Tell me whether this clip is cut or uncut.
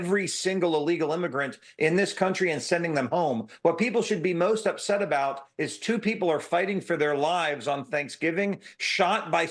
uncut